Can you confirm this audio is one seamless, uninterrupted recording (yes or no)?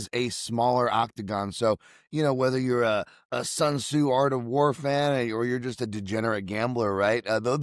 yes